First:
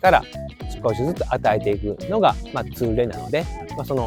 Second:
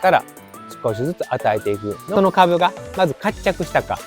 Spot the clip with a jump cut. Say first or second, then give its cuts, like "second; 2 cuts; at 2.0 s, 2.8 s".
second; 1 cut; at 2.0 s